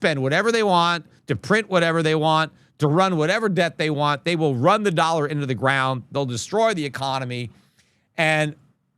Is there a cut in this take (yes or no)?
no